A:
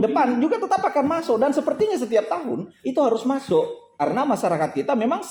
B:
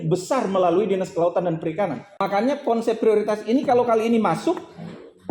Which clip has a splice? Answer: B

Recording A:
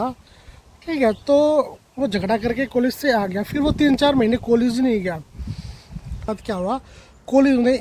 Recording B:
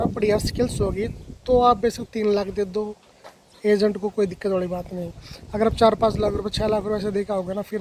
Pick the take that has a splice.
A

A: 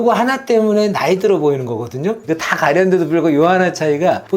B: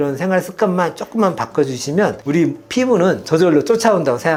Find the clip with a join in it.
A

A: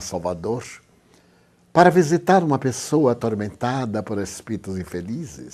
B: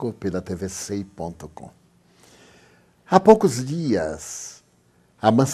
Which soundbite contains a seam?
A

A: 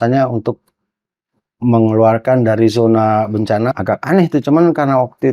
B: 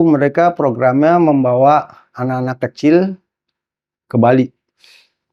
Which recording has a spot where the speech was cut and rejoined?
A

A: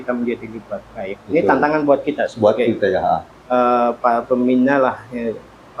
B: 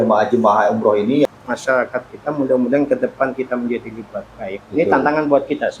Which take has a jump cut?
B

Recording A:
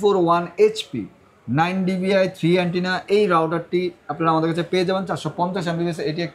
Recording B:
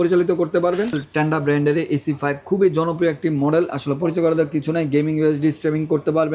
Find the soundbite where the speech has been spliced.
B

